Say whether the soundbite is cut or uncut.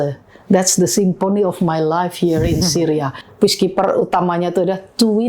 cut